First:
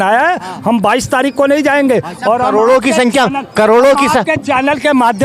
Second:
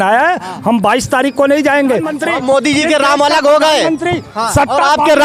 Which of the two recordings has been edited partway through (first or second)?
second